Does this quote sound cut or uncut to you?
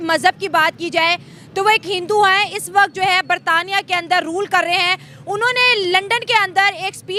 uncut